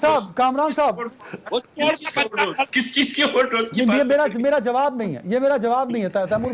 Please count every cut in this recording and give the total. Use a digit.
1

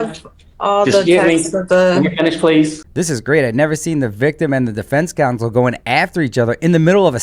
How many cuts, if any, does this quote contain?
1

